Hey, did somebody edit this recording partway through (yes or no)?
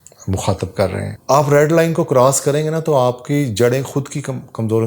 yes